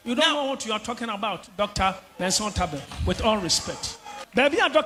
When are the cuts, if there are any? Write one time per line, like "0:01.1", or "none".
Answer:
none